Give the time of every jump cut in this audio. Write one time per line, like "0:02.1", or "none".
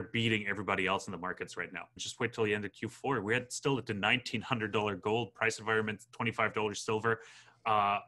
0:02.0